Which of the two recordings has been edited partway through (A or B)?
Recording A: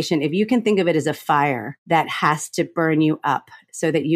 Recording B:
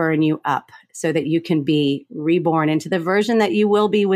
A